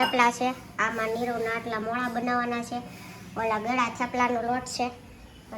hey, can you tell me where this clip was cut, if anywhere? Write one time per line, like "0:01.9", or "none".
none